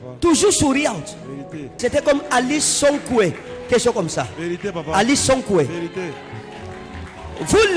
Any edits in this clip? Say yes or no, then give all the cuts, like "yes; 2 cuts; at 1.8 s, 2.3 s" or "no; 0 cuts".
yes; 1 cut; at 1.8 s